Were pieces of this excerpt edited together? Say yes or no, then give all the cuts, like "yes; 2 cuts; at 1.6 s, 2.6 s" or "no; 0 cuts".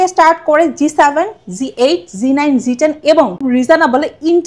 yes; 1 cut; at 3.4 s